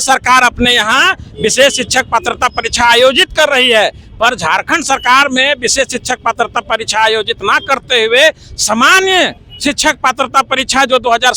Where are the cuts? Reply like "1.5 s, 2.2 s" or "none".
none